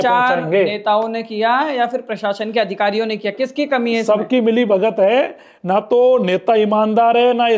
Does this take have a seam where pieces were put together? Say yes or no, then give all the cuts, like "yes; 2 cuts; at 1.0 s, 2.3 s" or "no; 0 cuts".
no; 0 cuts